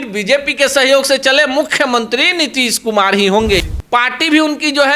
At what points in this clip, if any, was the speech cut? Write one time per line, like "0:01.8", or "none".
0:03.7

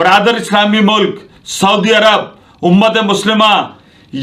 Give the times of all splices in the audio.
none

